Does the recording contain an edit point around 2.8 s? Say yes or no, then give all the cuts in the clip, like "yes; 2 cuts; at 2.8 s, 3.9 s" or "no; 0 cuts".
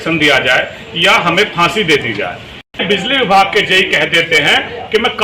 yes; 1 cut; at 2.8 s